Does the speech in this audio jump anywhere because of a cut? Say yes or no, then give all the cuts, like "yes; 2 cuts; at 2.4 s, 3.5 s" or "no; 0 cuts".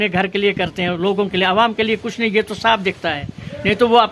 no; 0 cuts